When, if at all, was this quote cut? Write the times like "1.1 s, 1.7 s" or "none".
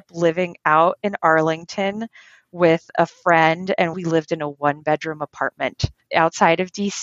4.0 s, 6.0 s